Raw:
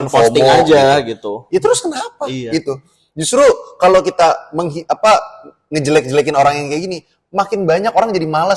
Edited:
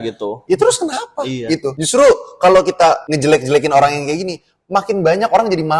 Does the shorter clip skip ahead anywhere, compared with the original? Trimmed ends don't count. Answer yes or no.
yes